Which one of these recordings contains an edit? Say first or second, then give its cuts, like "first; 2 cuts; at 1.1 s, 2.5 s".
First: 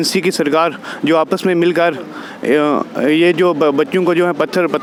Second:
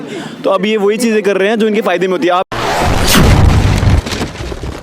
second; 1 cut; at 2.4 s